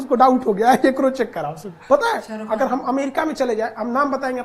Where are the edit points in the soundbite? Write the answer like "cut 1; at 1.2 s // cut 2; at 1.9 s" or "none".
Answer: cut 1; at 1.7 s